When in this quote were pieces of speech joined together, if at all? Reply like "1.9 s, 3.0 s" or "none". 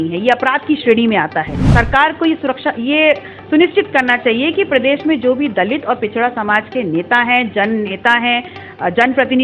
1.6 s